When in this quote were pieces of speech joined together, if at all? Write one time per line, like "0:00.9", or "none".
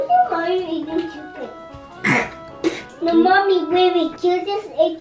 0:01.8
0:02.9
0:04.1